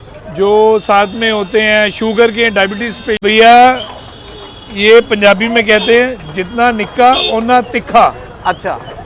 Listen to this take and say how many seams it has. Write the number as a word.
one